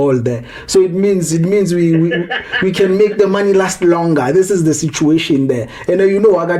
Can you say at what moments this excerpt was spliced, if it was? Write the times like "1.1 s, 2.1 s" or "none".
none